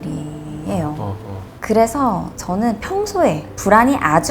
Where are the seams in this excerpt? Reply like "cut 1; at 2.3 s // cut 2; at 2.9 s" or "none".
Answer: cut 1; at 1.5 s // cut 2; at 2.3 s